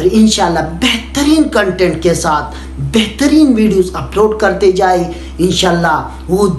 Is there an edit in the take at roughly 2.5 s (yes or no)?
no